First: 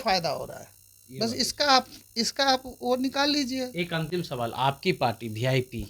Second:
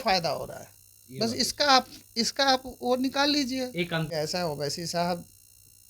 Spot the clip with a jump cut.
second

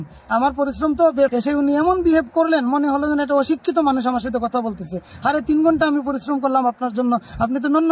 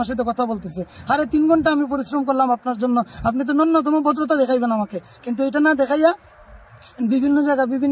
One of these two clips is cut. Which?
first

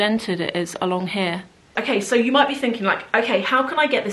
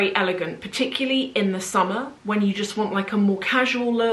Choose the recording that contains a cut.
first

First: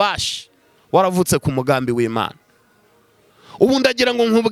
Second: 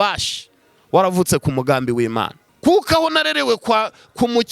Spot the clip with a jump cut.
second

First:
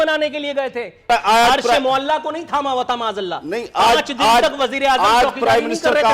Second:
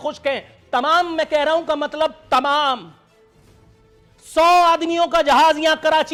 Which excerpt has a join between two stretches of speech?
first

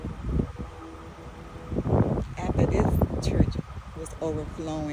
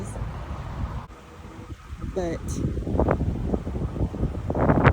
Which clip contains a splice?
second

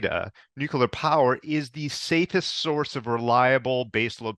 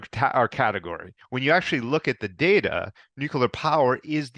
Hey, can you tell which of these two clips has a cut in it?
second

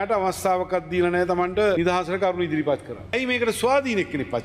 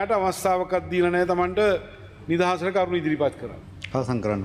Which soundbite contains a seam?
first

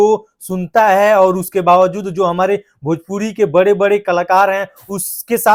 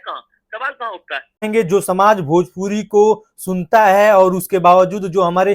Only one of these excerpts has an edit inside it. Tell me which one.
second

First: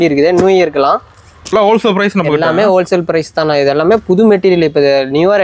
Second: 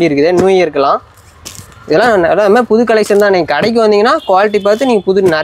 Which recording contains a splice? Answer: first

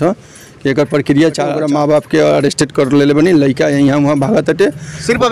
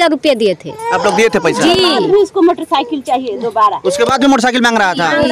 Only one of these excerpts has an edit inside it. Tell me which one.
first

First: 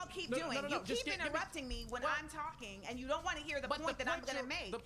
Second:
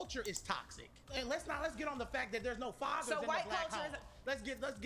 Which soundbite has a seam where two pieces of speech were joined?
second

